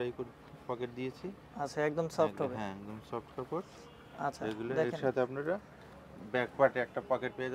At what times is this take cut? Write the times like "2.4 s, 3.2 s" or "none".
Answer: none